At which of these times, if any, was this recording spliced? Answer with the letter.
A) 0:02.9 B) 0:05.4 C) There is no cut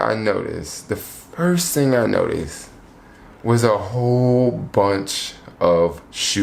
C